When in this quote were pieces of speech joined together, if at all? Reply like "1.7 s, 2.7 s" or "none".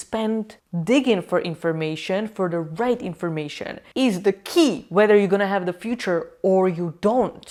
none

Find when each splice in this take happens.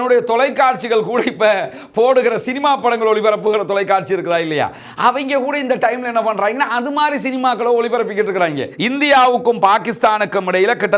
8.7 s

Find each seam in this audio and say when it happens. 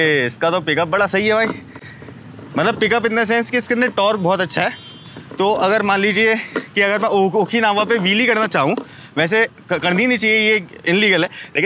none

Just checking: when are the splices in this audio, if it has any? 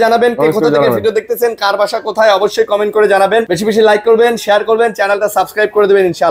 3.5 s

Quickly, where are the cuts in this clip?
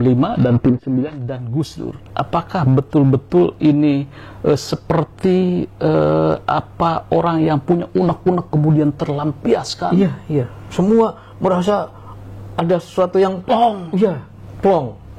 none

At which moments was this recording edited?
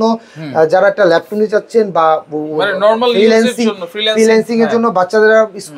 none

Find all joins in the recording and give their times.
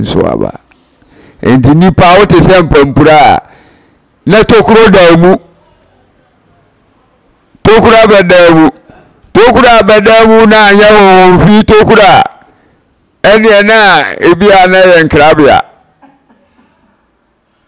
none

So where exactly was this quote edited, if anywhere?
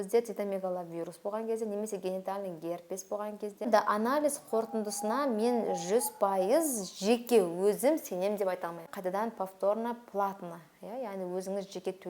3.7 s, 8.9 s

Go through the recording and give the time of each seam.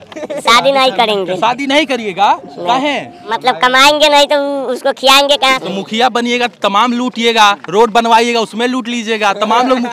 3.3 s, 5.6 s

